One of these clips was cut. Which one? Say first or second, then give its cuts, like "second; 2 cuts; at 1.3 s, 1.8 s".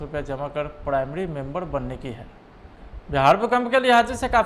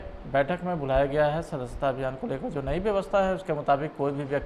first; 1 cut; at 2.9 s